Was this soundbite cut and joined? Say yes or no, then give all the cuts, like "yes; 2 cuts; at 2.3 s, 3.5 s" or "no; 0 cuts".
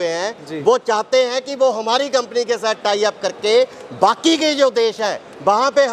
no; 0 cuts